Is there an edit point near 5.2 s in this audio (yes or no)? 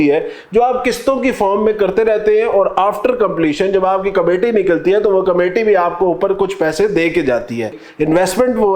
no